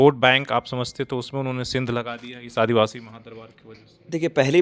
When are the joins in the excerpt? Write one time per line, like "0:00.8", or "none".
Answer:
none